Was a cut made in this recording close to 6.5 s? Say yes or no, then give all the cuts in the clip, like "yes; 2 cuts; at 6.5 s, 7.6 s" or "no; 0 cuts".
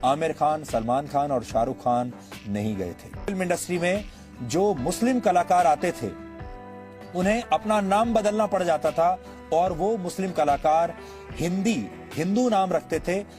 no; 1 cut; at 3.3 s